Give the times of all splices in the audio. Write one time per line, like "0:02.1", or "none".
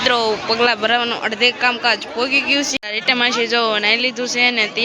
0:02.7